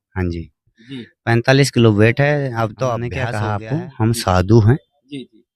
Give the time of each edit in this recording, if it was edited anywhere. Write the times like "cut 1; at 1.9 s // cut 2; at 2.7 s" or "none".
cut 1; at 3.3 s